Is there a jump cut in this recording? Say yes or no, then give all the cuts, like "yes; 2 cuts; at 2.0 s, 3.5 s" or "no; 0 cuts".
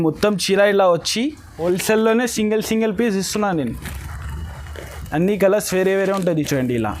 yes; 1 cut; at 1.6 s